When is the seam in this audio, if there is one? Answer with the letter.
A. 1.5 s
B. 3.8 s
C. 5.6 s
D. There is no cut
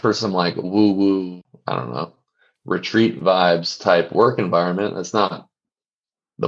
A